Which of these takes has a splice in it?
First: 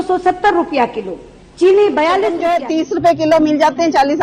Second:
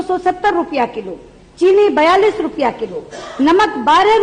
first; 1 cut; at 2.6 s

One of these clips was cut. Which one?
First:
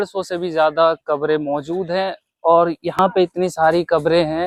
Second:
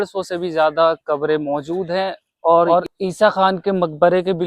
second; 1 cut; at 2.7 s

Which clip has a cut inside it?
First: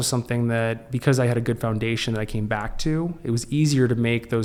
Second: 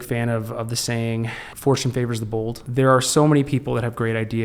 second; 2 cuts; at 1.4 s, 2.6 s

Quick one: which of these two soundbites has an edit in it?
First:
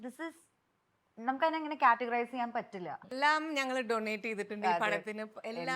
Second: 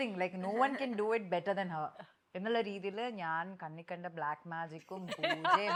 first; 1 cut; at 3.1 s

